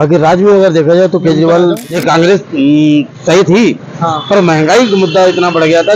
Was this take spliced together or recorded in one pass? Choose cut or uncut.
cut